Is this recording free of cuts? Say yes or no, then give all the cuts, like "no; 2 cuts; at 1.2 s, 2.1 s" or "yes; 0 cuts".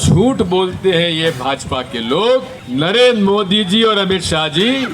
no; 1 cut; at 2.6 s